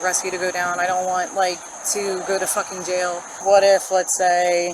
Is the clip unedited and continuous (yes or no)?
no